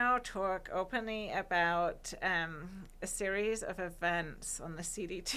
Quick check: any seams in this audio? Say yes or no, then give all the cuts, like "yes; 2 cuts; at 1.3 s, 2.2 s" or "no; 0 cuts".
no; 0 cuts